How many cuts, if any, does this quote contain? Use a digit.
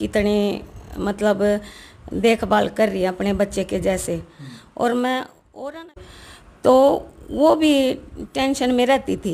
1